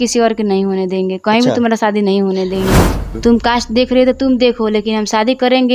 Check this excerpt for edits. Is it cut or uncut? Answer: cut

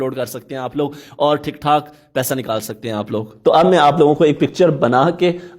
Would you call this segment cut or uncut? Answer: cut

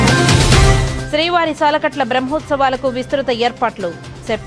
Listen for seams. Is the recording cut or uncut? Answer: uncut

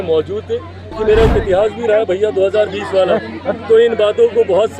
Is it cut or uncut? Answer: cut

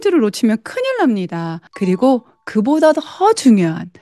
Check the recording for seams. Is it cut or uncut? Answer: cut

